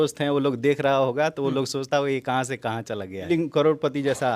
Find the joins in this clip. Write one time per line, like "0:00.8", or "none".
0:03.2